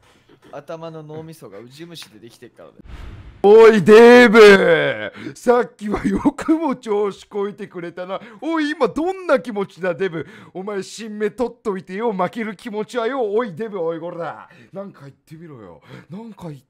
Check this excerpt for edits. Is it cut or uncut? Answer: cut